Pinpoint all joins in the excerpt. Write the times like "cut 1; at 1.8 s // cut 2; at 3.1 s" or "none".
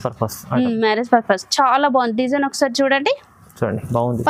none